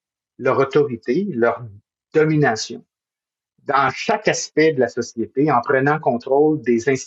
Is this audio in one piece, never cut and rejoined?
yes; 0 cuts

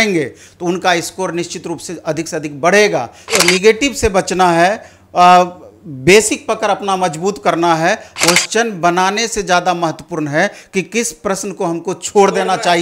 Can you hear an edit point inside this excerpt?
yes; 2 cuts; at 3.3 s, 8.1 s

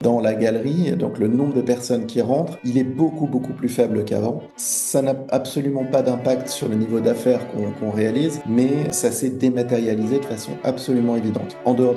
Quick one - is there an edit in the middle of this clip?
yes; 3 cuts; at 2.6 s, 6.6 s, 8.8 s

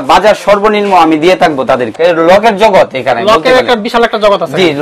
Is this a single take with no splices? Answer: no; 1 cut; at 1.9 s

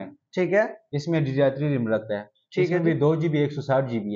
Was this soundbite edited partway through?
no; 0 cuts

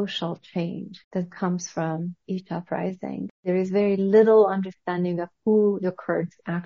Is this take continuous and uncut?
no; 2 cuts; at 0.9 s, 3.4 s

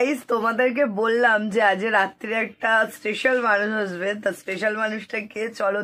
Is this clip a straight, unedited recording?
yes; 0 cuts

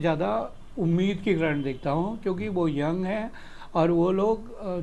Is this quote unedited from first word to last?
yes; 0 cuts

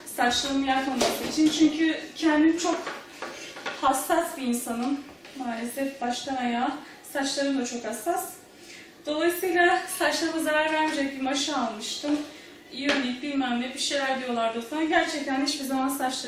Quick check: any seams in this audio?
yes; 1 cut; at 11.0 s

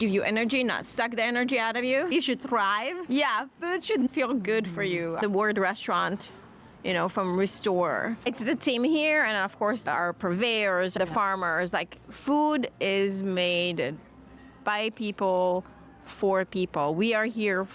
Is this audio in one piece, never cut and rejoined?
no; 5 cuts; at 3.0 s, 4.1 s, 8.2 s, 9.8 s, 10.9 s

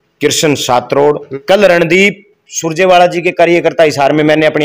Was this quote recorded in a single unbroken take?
no; 1 cut; at 1.3 s

